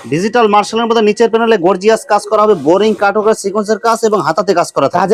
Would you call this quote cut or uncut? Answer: uncut